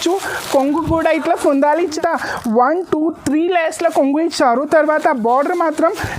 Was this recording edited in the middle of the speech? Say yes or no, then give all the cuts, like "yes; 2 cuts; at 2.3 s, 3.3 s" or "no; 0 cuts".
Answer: yes; 1 cut; at 1.9 s